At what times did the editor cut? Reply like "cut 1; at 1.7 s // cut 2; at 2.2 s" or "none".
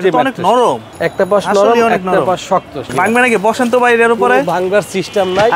cut 1; at 0.9 s // cut 2; at 2.9 s